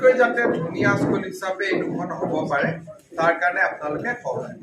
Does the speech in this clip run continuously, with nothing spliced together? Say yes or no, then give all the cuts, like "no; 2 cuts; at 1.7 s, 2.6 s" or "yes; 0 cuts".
yes; 0 cuts